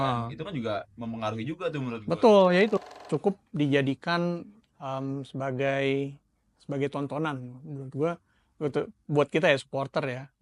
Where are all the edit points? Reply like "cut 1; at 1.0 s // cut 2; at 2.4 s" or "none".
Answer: cut 1; at 2.8 s